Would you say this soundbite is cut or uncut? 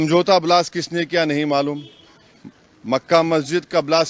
uncut